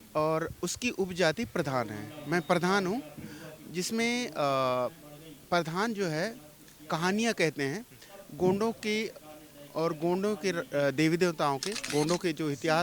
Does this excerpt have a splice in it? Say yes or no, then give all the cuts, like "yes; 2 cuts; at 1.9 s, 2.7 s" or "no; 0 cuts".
yes; 1 cut; at 11.8 s